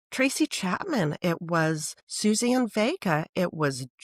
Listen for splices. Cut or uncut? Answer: uncut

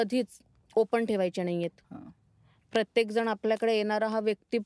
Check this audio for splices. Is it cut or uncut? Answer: cut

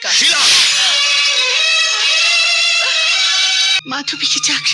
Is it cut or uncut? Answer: cut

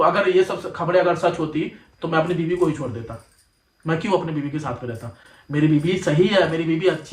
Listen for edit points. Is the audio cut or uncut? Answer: uncut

